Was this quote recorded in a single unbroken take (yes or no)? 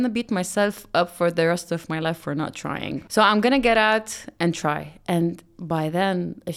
no